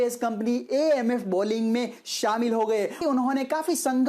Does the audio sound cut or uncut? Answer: cut